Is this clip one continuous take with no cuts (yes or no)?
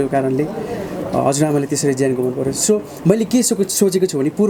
yes